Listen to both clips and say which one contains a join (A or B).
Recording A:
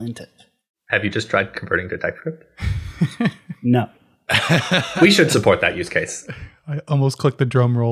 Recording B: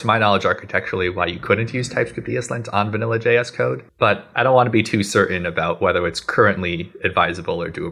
B